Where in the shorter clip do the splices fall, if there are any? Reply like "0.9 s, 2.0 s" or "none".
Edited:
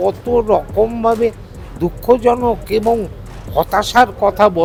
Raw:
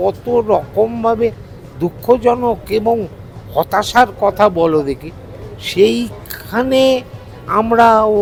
none